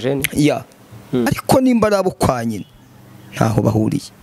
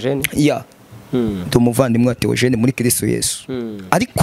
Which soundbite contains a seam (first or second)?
first